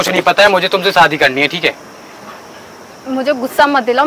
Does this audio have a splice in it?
no; 0 cuts

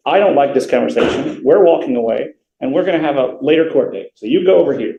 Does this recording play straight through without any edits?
yes; 0 cuts

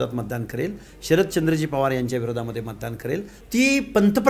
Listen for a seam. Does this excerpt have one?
yes; 1 cut; at 3.3 s

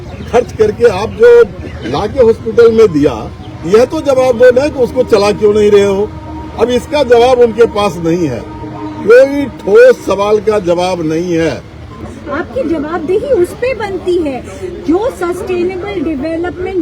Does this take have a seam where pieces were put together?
yes; 1 cut; at 12.0 s

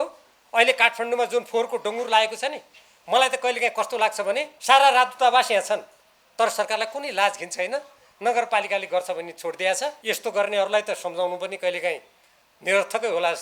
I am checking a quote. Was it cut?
yes; 2 cuts; at 4.5 s, 10.0 s

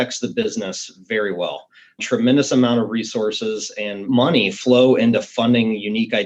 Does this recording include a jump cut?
yes; 1 cut; at 4.0 s

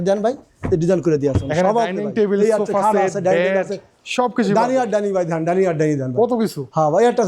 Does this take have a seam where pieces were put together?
yes; 1 cut; at 1.4 s

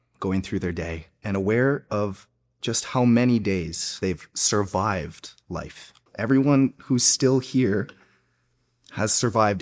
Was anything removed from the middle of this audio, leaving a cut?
yes; 3 cuts; at 1.1 s, 4.0 s, 6.1 s

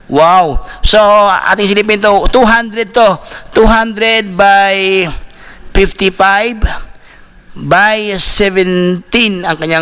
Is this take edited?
no; 0 cuts

